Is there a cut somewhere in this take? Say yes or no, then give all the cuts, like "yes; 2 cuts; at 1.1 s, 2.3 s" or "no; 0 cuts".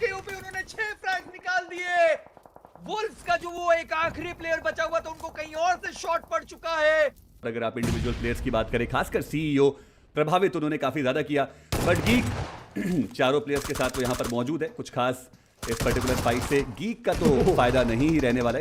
no; 0 cuts